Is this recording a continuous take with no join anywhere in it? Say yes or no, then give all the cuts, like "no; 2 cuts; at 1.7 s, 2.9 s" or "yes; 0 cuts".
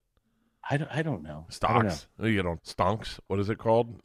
no; 1 cut; at 2.6 s